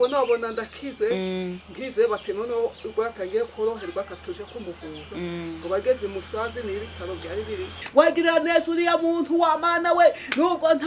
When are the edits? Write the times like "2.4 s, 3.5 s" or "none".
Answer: 7.8 s